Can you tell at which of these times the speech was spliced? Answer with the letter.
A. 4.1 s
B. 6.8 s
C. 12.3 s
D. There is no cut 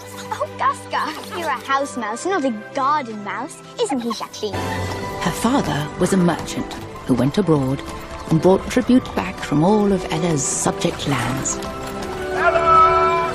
D